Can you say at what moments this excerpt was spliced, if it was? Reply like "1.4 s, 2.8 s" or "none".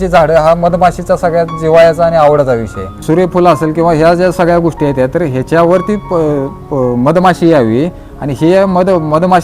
3.0 s